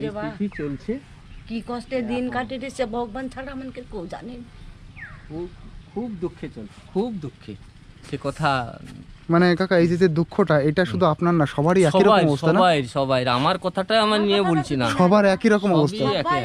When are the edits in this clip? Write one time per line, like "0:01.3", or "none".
none